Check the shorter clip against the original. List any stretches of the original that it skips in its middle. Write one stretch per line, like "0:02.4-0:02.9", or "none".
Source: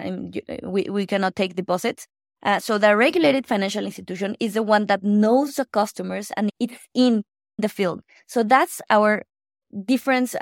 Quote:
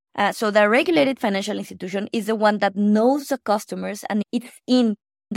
none